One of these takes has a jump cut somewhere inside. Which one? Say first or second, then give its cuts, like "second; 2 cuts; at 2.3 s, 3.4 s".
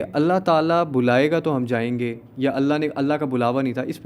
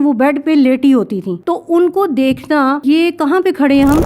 second; 2 cuts; at 1.3 s, 2.8 s